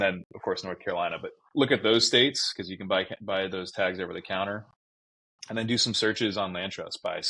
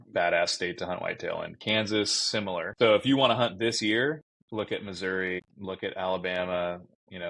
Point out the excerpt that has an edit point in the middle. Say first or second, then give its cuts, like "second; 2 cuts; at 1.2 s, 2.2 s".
second; 3 cuts; at 2.7 s, 4.3 s, 5.5 s